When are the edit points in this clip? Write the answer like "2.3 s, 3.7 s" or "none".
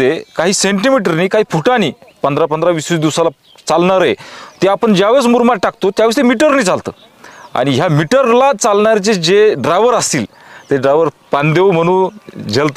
none